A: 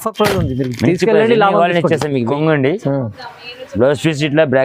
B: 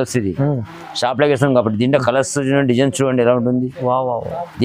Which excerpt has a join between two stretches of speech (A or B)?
A